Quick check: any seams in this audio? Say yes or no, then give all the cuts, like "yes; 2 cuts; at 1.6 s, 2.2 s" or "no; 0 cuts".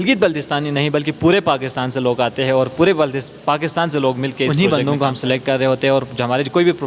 yes; 1 cut; at 4.5 s